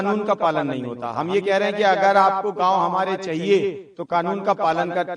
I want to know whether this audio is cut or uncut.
uncut